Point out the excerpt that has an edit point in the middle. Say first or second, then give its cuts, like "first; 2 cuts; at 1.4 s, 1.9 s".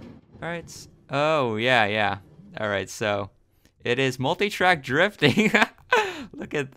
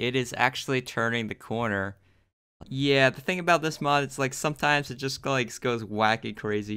second; 1 cut; at 2.5 s